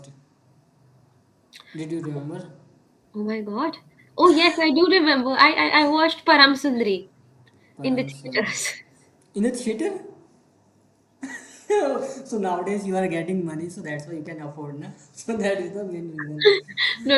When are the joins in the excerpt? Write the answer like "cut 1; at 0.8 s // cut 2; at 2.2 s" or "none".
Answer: none